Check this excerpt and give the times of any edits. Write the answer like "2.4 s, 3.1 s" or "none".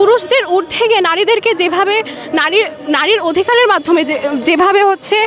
none